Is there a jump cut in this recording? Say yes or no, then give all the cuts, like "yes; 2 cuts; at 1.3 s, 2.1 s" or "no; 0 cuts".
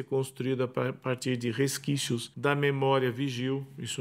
yes; 1 cut; at 2.3 s